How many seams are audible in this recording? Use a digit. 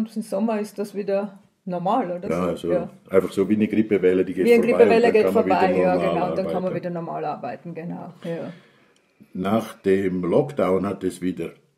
0